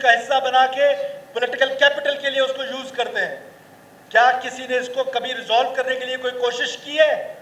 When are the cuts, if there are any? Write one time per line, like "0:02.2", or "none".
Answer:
none